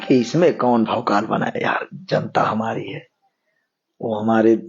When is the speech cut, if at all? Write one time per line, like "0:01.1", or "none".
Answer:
none